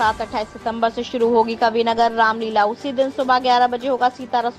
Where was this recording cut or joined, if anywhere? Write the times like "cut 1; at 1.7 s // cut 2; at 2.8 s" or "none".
none